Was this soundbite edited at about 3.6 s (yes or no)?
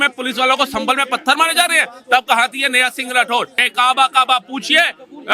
yes